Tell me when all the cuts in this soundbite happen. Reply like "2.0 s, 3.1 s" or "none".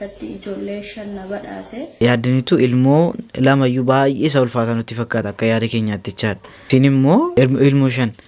1.9 s, 6.5 s, 7.3 s